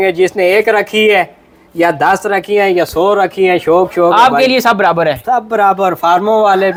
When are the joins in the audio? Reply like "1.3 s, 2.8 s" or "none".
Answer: none